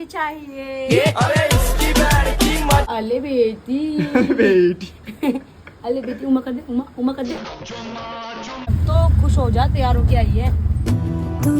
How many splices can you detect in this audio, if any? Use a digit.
2